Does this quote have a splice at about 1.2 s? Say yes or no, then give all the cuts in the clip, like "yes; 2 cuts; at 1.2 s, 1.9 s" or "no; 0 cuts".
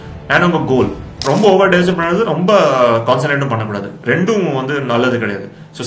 yes; 1 cut; at 1.2 s